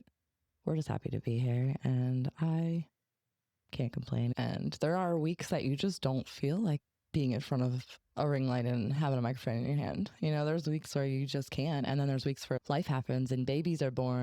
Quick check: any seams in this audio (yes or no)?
yes